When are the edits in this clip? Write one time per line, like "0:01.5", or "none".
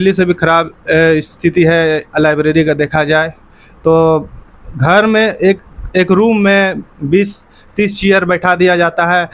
none